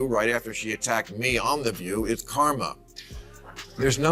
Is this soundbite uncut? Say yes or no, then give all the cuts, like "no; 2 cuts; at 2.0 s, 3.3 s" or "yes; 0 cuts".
yes; 0 cuts